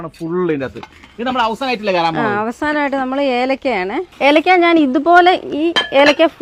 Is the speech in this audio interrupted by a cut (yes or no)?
no